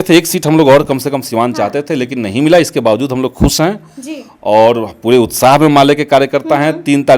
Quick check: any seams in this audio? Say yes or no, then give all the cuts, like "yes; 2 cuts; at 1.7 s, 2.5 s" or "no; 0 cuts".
no; 0 cuts